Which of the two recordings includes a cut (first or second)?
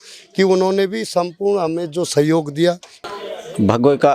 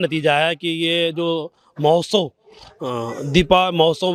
first